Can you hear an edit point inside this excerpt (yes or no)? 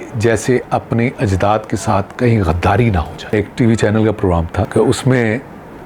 yes